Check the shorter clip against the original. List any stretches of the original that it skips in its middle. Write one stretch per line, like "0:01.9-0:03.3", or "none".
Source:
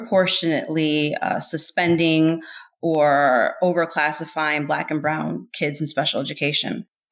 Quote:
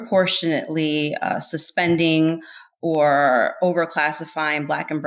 none